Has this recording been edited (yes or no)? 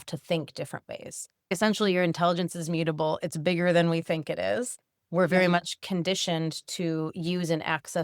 yes